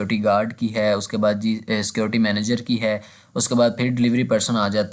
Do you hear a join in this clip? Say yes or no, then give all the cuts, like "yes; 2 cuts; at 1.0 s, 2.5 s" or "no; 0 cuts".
no; 0 cuts